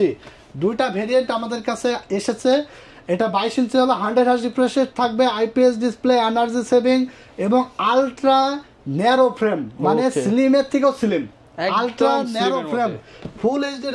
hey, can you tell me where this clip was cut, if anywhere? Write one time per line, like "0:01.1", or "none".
none